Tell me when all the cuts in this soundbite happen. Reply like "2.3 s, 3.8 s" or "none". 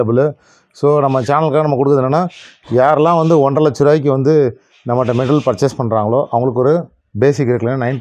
none